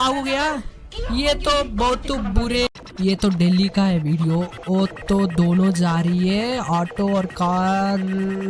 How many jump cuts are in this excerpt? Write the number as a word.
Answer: one